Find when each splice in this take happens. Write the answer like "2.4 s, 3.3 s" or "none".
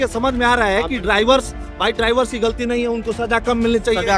none